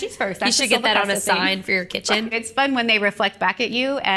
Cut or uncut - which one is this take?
cut